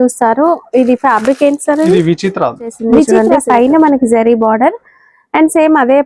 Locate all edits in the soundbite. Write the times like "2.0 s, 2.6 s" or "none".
3.1 s